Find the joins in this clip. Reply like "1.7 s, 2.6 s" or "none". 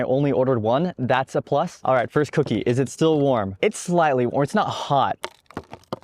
1.0 s